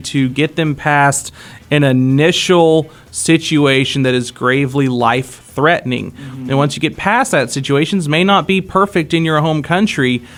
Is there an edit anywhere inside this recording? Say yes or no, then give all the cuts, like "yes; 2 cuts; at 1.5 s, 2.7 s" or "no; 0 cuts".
no; 0 cuts